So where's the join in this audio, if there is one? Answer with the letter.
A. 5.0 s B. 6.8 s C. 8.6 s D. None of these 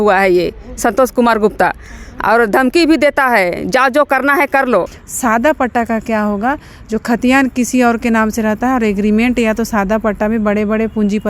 A